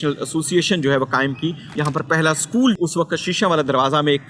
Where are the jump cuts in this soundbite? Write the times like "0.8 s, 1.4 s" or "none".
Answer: 1.6 s, 2.8 s